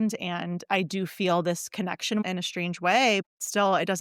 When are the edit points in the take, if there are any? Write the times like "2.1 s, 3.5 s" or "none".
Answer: 2.2 s, 3.2 s